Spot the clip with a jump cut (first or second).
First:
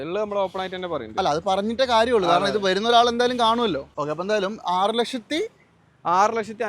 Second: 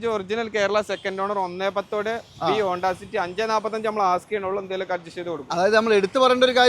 first